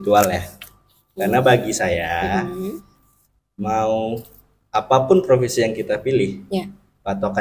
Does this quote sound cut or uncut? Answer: uncut